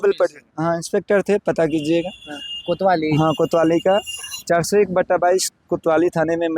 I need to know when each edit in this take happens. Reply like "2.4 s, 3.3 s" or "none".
none